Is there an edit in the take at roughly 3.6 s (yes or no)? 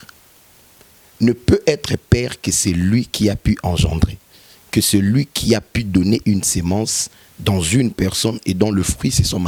no